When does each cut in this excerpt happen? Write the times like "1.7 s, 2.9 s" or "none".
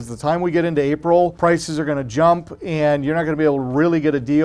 1.3 s